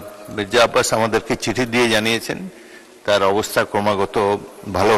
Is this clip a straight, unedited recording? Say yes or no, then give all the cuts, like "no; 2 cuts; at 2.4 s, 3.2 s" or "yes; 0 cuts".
yes; 0 cuts